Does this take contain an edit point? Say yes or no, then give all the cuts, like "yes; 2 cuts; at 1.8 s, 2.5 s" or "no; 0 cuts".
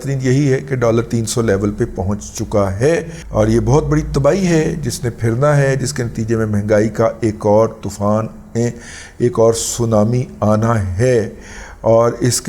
no; 0 cuts